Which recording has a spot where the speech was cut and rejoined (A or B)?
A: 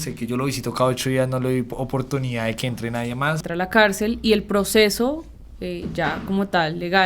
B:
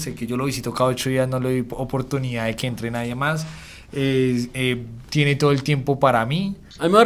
A